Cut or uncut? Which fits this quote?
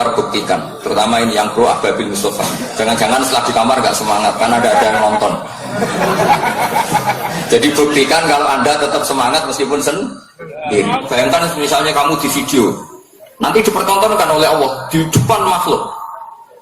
cut